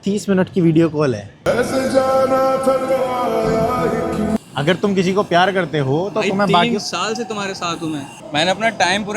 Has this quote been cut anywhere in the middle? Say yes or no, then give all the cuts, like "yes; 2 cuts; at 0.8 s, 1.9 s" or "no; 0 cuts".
yes; 2 cuts; at 4.4 s, 8.1 s